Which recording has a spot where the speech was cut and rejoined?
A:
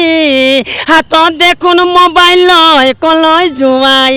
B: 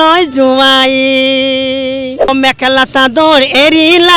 B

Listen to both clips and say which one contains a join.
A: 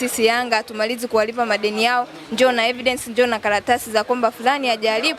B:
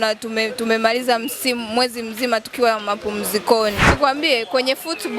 B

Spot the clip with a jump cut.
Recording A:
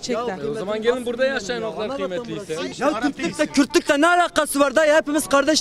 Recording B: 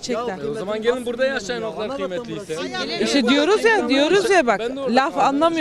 A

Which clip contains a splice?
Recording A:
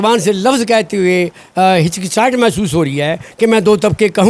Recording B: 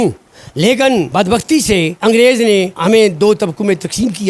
B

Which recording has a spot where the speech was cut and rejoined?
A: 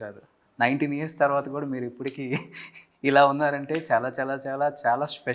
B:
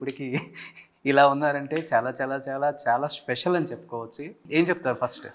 B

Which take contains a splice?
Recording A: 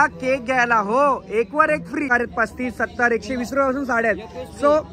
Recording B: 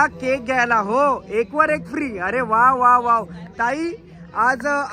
A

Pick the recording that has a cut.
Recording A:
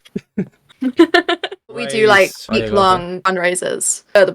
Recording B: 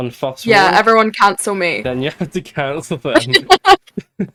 A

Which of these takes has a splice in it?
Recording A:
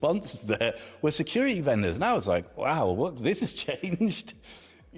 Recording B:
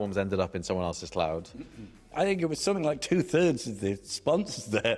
B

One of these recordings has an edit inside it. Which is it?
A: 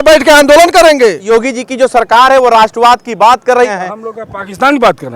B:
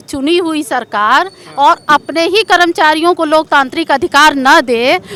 A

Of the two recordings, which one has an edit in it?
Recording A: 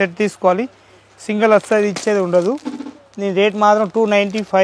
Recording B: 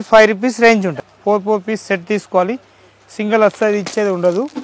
B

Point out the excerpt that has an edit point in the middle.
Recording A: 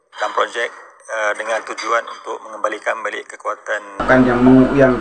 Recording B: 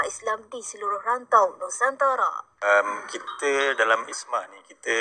A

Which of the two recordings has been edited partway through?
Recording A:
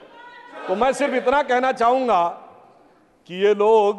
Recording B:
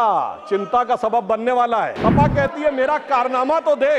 B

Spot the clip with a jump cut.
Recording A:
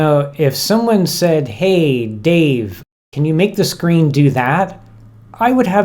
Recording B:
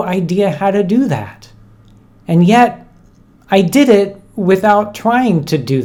A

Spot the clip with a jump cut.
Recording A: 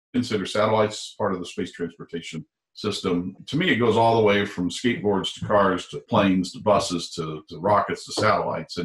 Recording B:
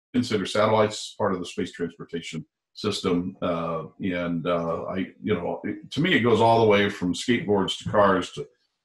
A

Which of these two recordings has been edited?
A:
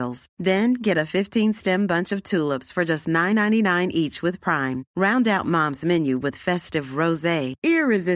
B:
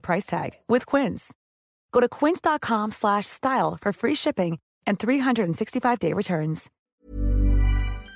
B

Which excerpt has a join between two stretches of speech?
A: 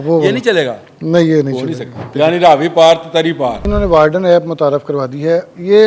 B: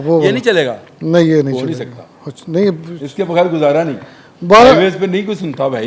A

